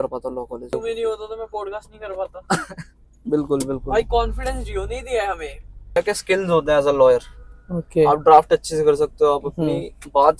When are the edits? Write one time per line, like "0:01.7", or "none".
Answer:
0:00.7
0:06.0